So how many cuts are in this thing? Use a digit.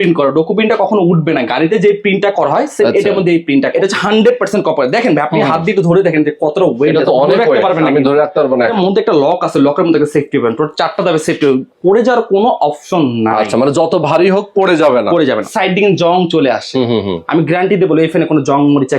3